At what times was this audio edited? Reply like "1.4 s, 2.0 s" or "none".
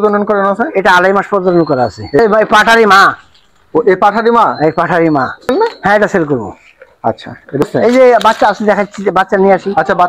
2.2 s, 5.5 s, 7.7 s